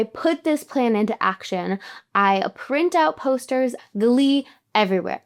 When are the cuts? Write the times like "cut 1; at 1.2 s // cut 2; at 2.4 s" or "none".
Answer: cut 1; at 3.8 s